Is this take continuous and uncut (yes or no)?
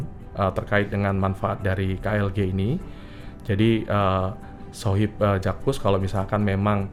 yes